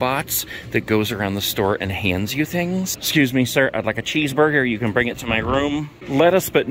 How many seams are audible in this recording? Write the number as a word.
one